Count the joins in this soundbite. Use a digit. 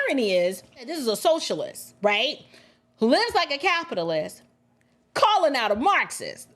1